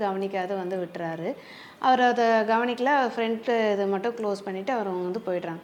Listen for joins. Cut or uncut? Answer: uncut